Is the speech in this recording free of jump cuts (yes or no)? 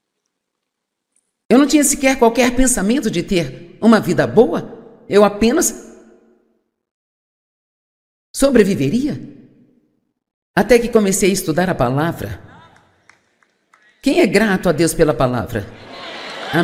yes